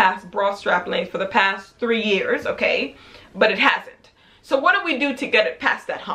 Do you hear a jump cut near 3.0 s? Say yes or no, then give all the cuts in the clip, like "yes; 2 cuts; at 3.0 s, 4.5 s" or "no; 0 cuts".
no; 0 cuts